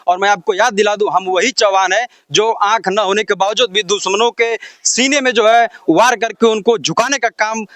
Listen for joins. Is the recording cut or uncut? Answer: uncut